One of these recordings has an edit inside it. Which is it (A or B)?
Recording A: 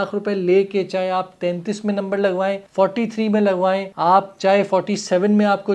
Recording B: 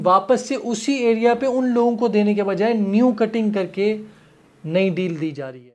A